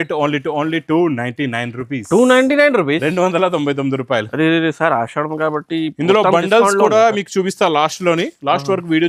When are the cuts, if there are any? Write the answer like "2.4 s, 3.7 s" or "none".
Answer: none